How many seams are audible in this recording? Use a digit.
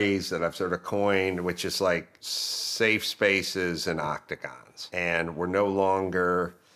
0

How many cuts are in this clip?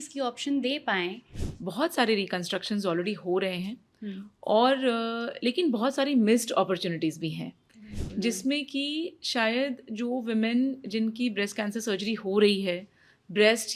1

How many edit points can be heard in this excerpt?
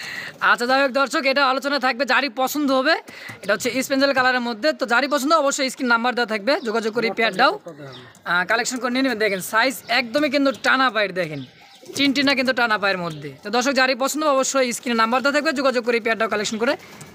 0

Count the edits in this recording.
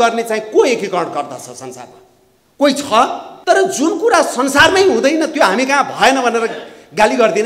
1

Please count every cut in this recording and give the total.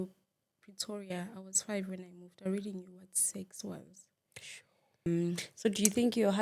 1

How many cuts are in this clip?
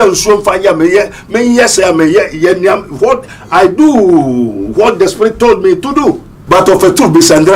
1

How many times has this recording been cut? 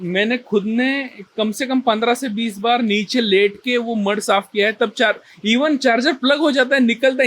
0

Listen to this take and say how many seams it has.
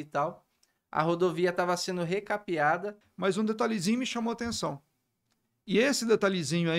1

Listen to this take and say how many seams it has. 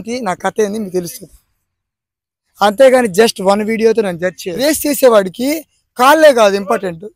1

